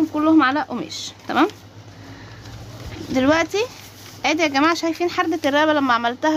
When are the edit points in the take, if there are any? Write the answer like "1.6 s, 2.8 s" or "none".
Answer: none

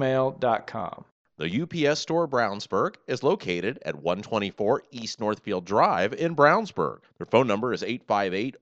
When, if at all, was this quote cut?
1.2 s

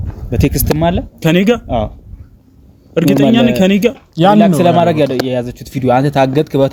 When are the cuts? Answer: none

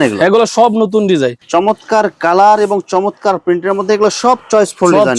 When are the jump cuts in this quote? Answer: 1.4 s

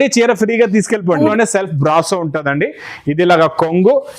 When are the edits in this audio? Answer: 1.3 s

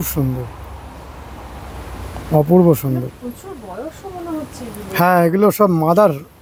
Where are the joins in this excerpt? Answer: none

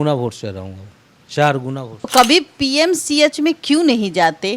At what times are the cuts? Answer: 2.1 s

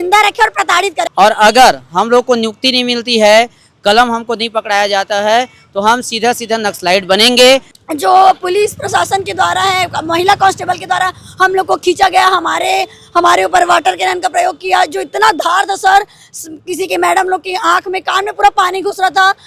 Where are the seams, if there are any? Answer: 1.1 s, 7.7 s

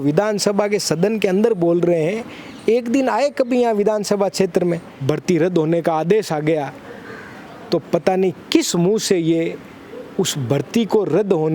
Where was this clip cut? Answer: 4.9 s

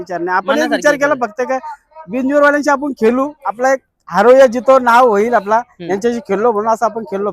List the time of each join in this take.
none

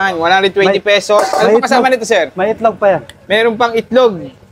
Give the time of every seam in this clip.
none

